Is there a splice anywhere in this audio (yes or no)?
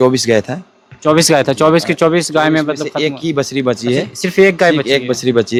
no